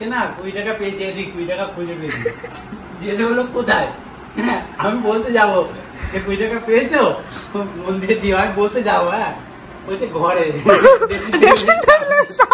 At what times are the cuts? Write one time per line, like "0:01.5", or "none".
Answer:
none